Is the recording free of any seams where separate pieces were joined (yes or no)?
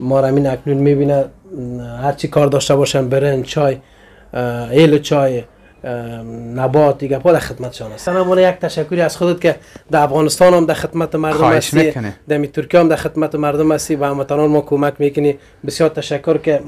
no